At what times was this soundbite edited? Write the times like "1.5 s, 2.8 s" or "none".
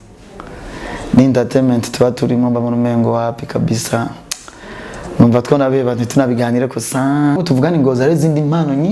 7.4 s